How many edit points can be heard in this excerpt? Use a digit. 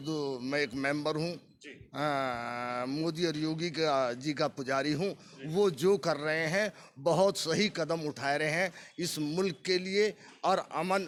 0